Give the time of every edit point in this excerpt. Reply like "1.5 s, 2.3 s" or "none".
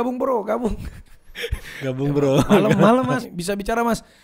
3.2 s